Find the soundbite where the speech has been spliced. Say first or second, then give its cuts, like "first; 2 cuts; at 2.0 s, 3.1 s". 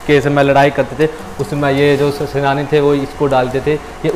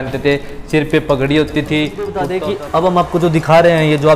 second; 1 cut; at 2.3 s